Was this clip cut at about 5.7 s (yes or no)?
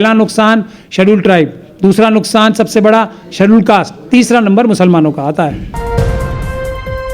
yes